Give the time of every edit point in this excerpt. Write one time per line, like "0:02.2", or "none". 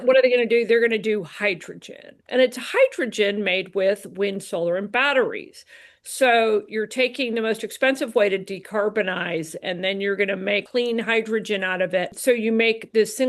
0:10.6
0:12.2

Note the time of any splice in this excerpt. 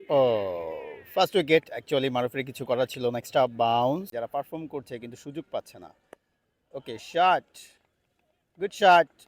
0:04.1

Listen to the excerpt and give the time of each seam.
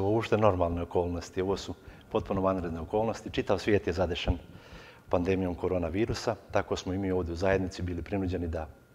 none

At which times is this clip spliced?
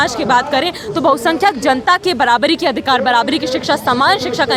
none

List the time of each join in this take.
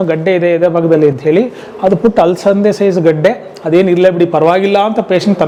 none

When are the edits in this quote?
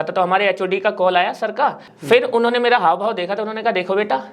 0:01.9

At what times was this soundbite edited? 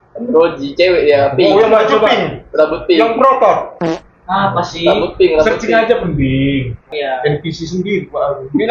0:06.9

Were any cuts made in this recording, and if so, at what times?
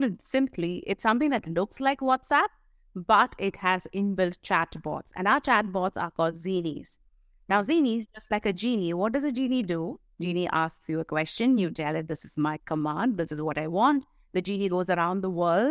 none

